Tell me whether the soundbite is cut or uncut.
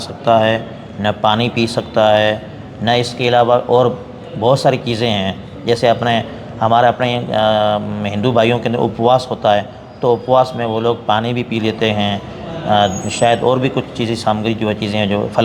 uncut